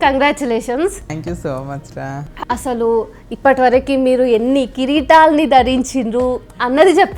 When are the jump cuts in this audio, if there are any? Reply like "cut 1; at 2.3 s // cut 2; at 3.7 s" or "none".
cut 1; at 1.2 s // cut 2; at 2.2 s